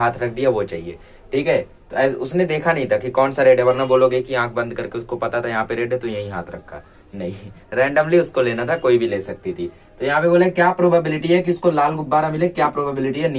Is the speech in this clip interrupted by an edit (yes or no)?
no